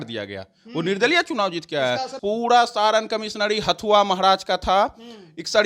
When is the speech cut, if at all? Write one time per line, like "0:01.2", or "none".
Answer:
0:02.1